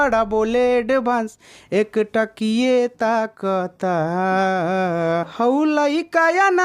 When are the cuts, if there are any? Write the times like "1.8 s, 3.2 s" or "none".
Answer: 5.3 s